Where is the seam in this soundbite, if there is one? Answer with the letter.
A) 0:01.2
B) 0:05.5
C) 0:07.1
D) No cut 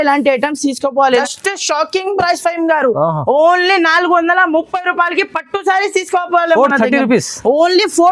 A